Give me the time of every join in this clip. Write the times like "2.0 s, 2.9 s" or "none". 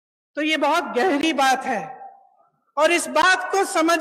none